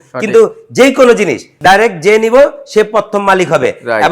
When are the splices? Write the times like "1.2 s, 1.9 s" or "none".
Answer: 1.5 s